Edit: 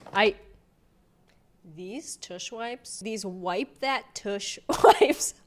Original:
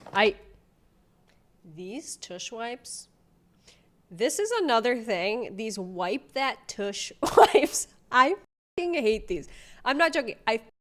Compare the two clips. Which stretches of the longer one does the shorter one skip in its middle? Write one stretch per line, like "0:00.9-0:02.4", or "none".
0:03.0-0:05.5